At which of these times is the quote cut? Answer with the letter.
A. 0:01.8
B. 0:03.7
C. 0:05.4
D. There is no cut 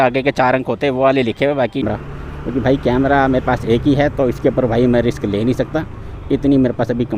A